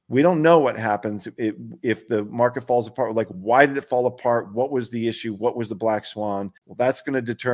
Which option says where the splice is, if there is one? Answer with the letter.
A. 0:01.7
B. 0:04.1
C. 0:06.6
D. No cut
C